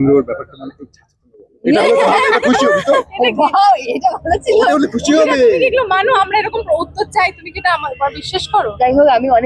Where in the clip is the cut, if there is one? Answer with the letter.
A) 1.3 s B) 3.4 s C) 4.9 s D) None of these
D